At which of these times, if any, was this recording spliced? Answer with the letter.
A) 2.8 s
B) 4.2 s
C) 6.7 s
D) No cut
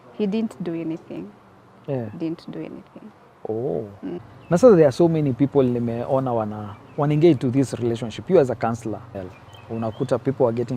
B